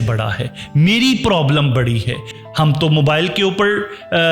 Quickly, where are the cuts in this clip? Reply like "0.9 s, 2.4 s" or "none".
2.3 s